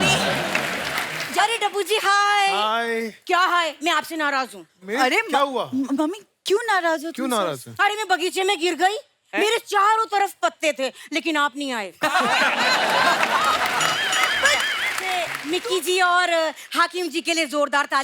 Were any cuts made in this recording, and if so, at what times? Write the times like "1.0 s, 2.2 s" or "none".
1.2 s, 15.0 s